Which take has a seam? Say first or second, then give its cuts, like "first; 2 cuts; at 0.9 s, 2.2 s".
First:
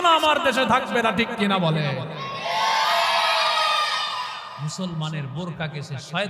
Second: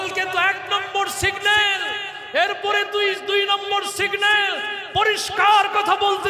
first; 1 cut; at 4.5 s